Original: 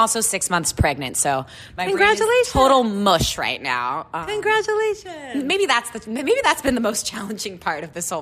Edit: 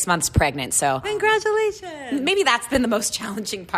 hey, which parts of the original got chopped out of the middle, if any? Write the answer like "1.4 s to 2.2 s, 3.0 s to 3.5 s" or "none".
1.5 s to 4.3 s, 5.9 s to 6.6 s